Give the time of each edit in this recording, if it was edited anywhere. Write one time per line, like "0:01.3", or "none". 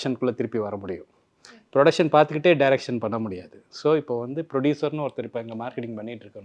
none